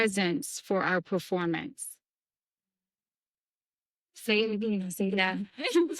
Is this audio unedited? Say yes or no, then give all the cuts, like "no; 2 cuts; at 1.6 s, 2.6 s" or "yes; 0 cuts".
yes; 0 cuts